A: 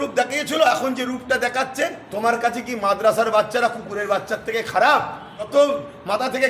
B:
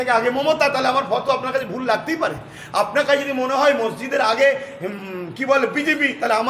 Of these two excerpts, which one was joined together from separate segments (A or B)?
A